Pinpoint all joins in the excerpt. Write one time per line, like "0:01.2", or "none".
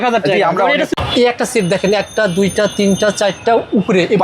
0:00.9